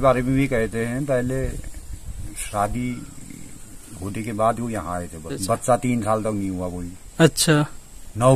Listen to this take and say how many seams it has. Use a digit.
1